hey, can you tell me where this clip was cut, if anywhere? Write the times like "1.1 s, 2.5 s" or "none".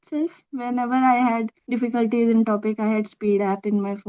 1.6 s